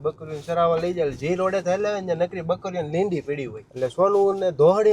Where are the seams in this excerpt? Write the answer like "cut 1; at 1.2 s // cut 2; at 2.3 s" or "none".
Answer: none